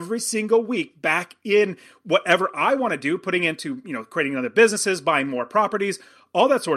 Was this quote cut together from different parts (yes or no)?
no